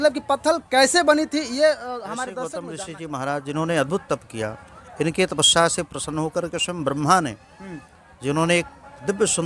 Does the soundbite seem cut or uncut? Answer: cut